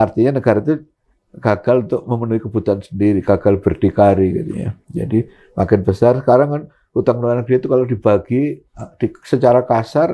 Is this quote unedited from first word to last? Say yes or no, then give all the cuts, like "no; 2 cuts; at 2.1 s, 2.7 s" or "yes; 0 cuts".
yes; 0 cuts